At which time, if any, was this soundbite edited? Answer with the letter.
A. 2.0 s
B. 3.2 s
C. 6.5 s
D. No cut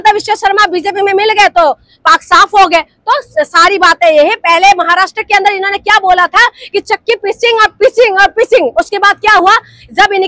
D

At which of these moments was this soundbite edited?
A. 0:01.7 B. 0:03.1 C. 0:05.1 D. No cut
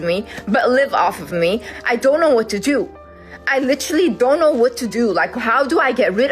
A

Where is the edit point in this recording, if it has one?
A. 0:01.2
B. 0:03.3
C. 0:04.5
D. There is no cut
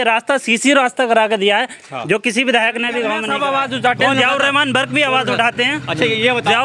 B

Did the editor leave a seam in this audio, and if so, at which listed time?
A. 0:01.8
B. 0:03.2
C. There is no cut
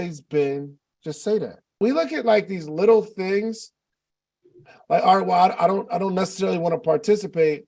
A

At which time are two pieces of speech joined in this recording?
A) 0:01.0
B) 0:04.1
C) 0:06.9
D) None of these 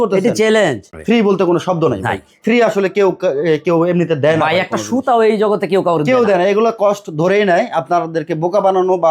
A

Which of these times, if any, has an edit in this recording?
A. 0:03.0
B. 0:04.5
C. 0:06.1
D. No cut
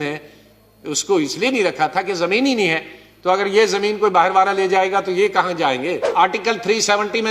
C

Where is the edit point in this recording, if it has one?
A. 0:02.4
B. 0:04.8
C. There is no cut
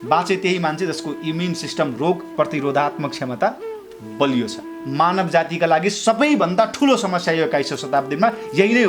B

